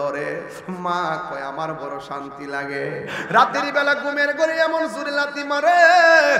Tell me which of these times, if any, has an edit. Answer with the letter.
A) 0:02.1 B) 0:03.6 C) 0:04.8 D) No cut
D